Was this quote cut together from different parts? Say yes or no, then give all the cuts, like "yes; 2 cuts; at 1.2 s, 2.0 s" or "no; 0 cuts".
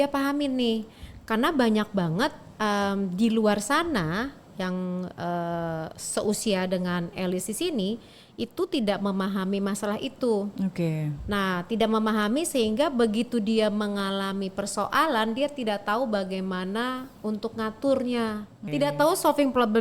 yes; 1 cut; at 18.6 s